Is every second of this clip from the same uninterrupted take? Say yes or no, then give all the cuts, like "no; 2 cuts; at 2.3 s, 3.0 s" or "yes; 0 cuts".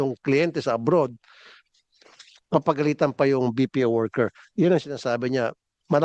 yes; 0 cuts